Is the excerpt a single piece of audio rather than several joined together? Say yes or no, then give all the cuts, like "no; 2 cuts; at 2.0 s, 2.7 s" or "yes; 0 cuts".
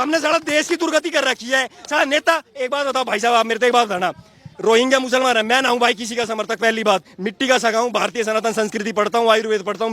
yes; 0 cuts